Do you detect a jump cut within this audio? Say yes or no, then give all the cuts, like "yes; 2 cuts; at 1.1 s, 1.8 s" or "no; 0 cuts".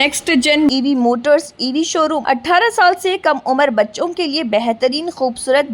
yes; 1 cut; at 2.2 s